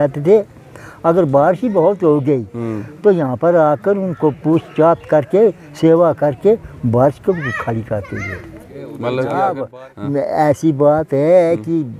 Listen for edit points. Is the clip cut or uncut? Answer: cut